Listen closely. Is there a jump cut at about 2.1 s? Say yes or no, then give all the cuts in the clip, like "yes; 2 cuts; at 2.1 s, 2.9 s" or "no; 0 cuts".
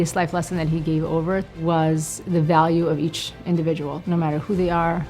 yes; 3 cuts; at 1.5 s, 2.1 s, 4.0 s